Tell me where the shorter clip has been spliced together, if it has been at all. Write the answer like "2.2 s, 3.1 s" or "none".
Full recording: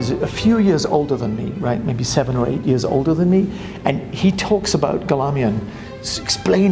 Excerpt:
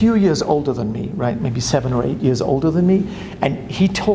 none